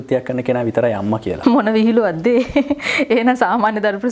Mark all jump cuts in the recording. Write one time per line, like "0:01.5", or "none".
0:01.3